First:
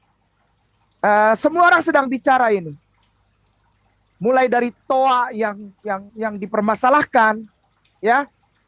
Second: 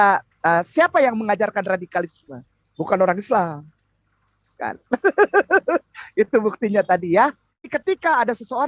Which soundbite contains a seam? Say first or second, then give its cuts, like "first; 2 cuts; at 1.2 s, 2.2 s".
second; 1 cut; at 7.7 s